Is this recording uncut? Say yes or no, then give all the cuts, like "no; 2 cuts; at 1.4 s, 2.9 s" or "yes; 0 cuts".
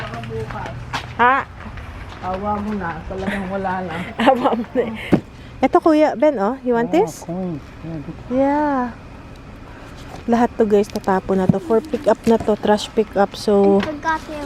no; 1 cut; at 5.0 s